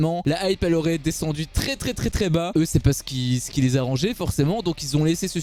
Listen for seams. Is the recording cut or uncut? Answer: uncut